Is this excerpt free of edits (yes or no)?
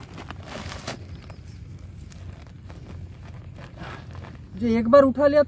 yes